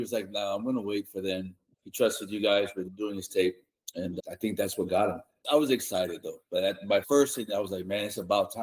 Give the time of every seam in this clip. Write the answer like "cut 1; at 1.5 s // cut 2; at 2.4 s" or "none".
cut 1; at 1.6 s // cut 2; at 2.9 s // cut 3; at 4.1 s // cut 4; at 5.4 s // cut 5; at 7.0 s